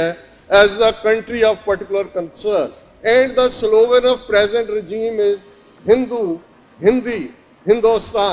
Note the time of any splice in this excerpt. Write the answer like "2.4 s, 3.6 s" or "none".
2.8 s